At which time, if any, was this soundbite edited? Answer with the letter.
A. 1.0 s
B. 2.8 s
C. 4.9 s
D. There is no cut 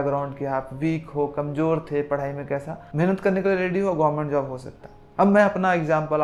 D